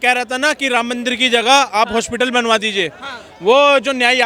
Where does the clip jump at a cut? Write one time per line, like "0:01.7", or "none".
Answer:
none